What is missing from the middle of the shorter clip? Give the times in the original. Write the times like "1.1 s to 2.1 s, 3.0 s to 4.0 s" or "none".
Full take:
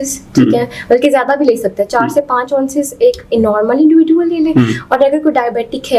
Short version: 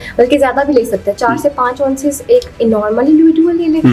none